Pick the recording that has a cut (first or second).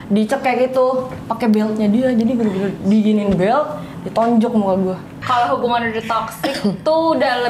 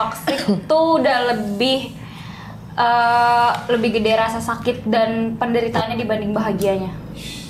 first